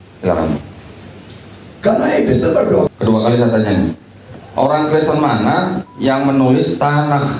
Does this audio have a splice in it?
yes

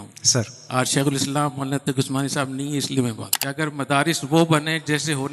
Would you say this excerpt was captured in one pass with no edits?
no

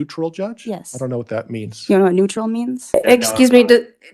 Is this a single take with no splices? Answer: no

